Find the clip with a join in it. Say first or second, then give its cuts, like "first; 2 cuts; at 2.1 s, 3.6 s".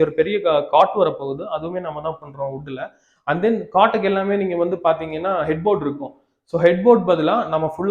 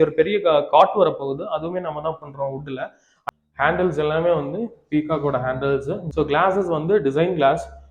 second; 2 cuts; at 3.1 s, 6.0 s